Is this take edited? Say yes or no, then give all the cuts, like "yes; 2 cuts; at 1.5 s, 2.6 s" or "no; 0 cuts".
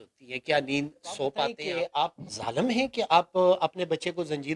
yes; 1 cut; at 1.6 s